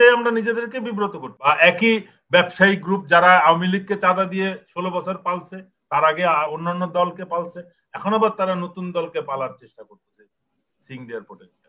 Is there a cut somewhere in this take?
yes; 1 cut; at 1.3 s

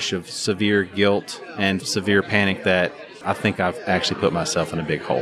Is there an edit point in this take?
yes; 2 cuts; at 1.9 s, 3.1 s

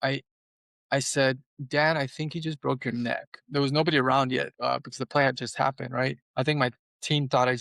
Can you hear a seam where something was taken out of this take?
yes; 3 cuts; at 3.4 s, 4.5 s, 6.2 s

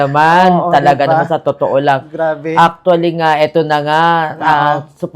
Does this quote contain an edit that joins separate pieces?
no; 0 cuts

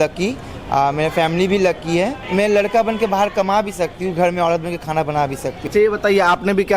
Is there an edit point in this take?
yes; 2 cuts; at 2.2 s, 5.6 s

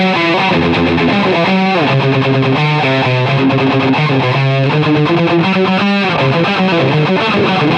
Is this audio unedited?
yes; 0 cuts

